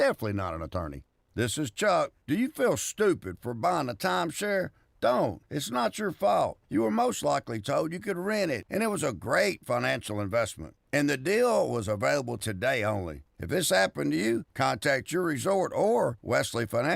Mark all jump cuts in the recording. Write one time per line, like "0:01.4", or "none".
none

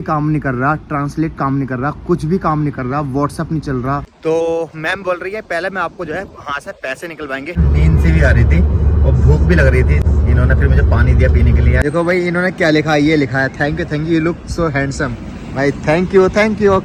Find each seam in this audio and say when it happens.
0:04.1
0:07.6
0:10.0
0:11.8

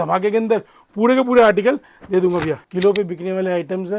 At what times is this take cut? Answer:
0:02.6

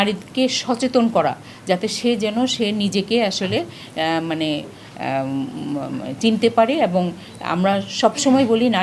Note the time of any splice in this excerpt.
none

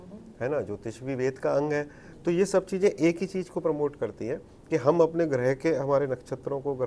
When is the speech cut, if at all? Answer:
none

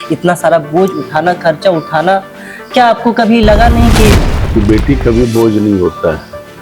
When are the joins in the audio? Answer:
0:04.3

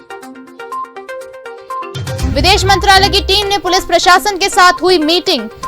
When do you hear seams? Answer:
0:02.3

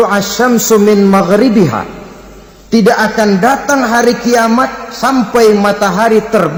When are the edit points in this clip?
none

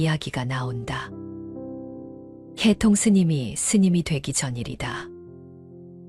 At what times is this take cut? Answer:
0:05.2

